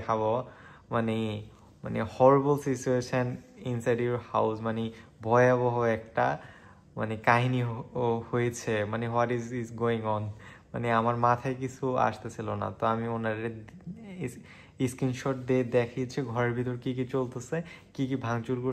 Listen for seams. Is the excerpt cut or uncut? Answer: uncut